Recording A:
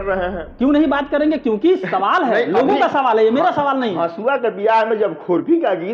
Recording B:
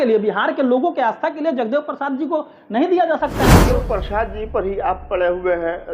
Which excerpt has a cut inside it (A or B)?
B